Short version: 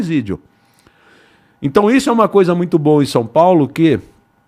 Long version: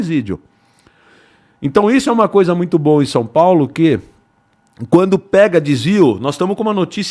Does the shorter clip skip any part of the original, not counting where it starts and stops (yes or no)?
no